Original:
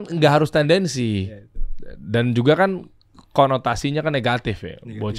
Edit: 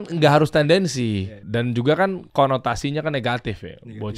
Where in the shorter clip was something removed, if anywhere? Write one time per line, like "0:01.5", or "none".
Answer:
0:01.3
0:02.2